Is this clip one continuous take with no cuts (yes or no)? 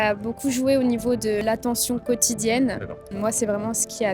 no